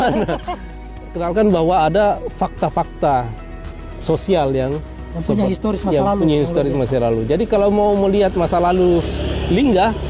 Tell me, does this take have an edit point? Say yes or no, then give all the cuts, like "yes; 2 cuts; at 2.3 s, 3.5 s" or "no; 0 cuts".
yes; 1 cut; at 0.9 s